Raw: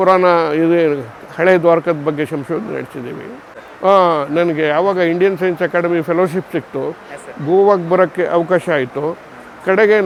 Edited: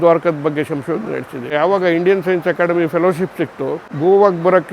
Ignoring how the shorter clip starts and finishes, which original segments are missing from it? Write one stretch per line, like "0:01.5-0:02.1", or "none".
0:03.2-0:04.7
0:07.0-0:07.3

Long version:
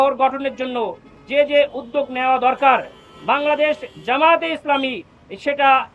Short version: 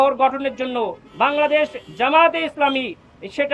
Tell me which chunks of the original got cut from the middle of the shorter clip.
0:01.0-0:03.1

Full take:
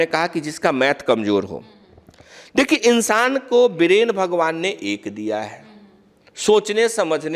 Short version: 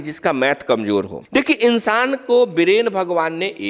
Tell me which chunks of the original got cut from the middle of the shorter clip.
0:01.6-0:02.4

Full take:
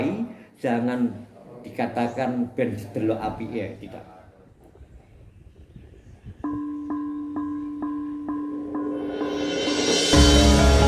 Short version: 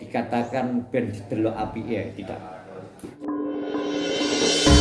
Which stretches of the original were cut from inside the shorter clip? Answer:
0:04.8-0:08.7

